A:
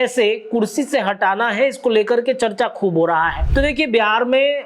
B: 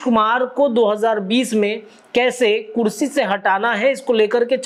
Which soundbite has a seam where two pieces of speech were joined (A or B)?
A